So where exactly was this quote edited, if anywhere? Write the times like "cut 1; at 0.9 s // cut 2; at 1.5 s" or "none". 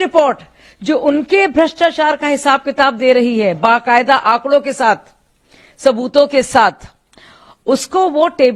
none